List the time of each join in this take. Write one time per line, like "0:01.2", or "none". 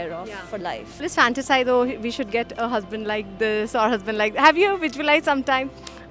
0:01.0